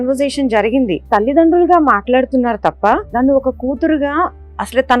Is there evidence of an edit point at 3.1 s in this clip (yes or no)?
yes